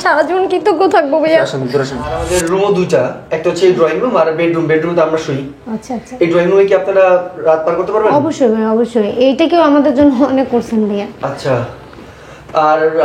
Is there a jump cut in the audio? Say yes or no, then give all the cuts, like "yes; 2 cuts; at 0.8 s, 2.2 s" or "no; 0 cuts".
yes; 1 cut; at 2.2 s